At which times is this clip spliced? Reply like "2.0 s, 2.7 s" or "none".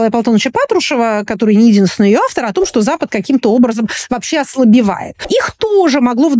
5.1 s